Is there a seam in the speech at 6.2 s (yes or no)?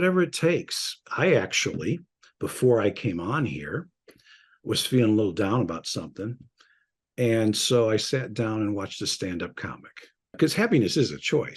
no